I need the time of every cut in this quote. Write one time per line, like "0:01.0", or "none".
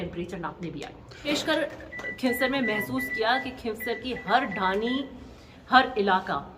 0:01.3